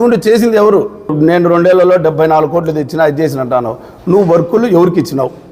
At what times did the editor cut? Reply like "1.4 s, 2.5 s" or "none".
1.1 s